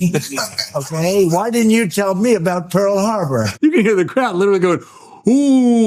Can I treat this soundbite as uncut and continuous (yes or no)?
no